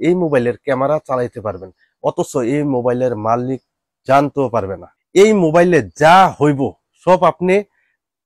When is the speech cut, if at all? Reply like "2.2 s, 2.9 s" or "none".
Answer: 4.8 s